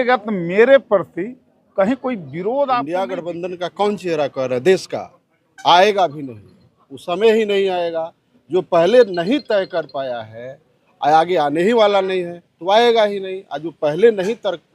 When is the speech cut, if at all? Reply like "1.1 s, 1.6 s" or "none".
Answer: 2.9 s